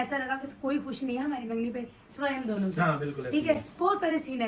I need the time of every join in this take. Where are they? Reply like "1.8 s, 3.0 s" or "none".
none